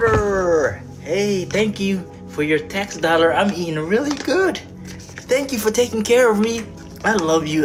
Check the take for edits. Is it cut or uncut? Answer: uncut